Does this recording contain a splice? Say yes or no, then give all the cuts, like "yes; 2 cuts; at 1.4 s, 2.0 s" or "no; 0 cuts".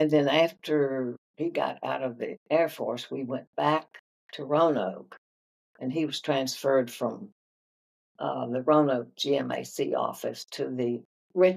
yes; 2 cuts; at 1.2 s, 2.4 s